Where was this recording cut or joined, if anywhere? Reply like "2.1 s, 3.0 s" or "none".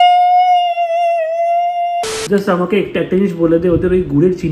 2.0 s